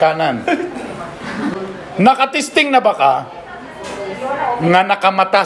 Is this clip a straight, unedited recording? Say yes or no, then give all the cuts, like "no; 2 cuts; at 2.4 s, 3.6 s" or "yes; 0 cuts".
no; 1 cut; at 1.5 s